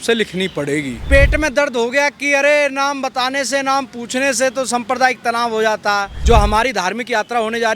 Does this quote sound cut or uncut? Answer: cut